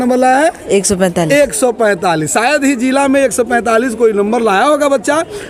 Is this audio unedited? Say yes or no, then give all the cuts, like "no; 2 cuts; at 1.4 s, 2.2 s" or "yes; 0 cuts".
yes; 0 cuts